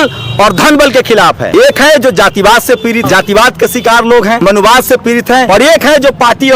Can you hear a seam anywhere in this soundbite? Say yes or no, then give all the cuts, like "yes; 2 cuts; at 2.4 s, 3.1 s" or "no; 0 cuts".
yes; 4 cuts; at 1.4 s, 3.0 s, 4.4 s, 5.5 s